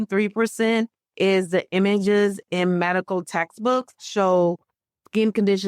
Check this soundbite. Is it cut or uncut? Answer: cut